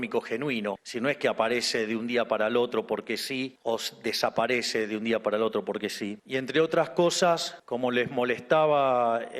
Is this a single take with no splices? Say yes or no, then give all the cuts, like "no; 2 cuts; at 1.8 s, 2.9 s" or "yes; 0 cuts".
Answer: yes; 0 cuts